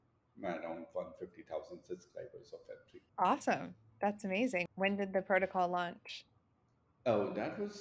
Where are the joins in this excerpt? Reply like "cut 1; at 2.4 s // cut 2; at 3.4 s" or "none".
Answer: cut 1; at 3.0 s // cut 2; at 4.6 s